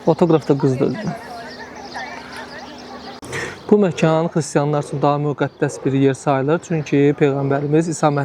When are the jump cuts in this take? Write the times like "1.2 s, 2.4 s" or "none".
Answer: 3.2 s